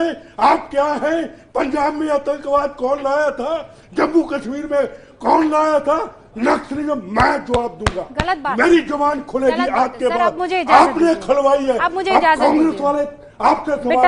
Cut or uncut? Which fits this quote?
uncut